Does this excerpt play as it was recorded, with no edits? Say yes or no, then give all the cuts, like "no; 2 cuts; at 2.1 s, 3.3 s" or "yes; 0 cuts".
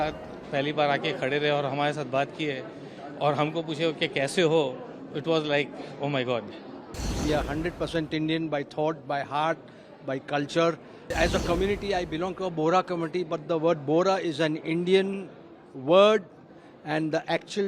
no; 2 cuts; at 7.0 s, 11.1 s